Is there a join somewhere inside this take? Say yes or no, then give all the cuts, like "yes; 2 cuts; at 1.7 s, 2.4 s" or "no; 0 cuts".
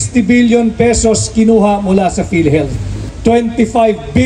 yes; 1 cut; at 3.0 s